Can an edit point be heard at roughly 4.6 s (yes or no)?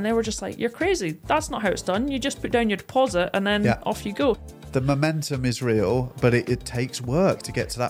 yes